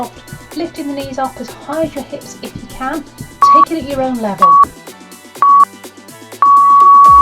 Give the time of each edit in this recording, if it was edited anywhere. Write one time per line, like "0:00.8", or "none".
0:03.2